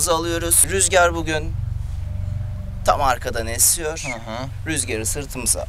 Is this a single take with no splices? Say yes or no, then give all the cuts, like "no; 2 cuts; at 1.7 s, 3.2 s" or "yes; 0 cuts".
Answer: yes; 0 cuts